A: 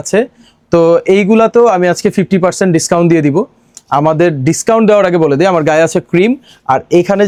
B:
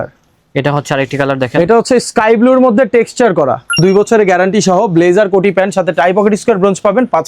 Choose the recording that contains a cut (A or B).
B